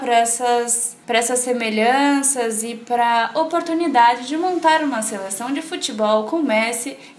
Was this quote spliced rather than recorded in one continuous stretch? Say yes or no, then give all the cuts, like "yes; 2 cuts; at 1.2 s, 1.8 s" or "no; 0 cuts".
no; 0 cuts